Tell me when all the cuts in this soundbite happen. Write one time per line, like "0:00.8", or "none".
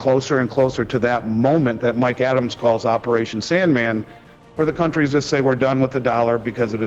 none